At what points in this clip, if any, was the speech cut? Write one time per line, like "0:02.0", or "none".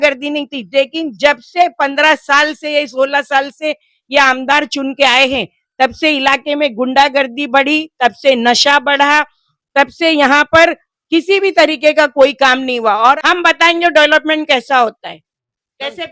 0:13.2